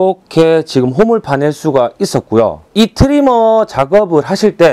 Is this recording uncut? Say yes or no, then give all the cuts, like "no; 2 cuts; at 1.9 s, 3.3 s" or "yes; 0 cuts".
yes; 0 cuts